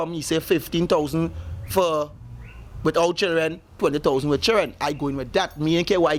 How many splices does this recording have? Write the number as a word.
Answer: zero